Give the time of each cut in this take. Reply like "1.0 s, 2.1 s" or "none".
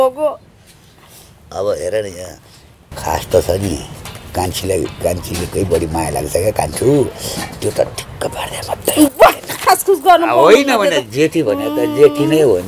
none